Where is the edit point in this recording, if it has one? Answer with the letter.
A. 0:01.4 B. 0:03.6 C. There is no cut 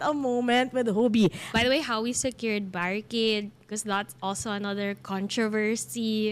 A